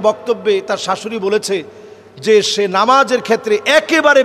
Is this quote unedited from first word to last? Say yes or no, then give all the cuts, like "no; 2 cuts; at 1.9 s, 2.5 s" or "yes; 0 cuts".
yes; 0 cuts